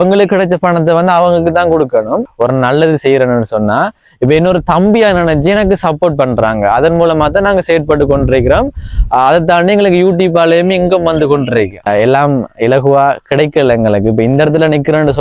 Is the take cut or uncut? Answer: cut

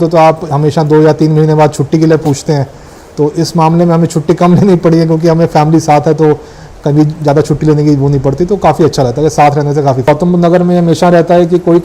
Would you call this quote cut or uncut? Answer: cut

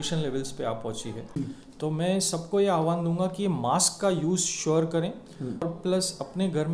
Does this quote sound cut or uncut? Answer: cut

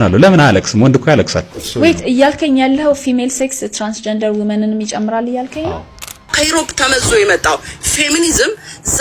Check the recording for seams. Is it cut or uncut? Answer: cut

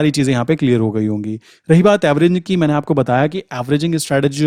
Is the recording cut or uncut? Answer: uncut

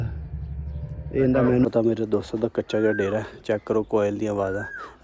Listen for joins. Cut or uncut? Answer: cut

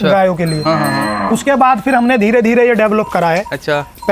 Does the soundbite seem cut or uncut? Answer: uncut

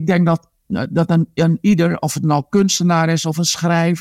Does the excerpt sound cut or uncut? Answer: uncut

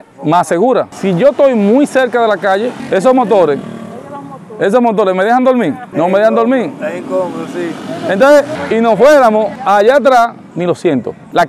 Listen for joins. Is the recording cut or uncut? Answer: cut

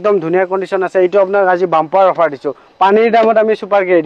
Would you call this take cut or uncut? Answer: uncut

